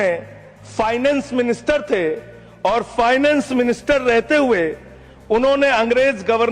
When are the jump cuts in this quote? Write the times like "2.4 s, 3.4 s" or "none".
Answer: none